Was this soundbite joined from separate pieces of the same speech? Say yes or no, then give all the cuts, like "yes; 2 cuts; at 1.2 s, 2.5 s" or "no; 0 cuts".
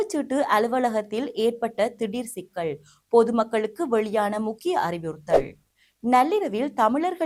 no; 0 cuts